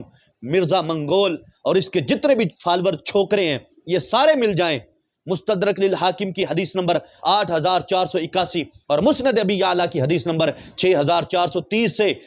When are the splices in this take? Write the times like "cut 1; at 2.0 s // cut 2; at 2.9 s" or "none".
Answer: none